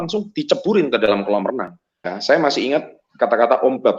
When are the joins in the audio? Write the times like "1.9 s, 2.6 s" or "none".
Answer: 2.1 s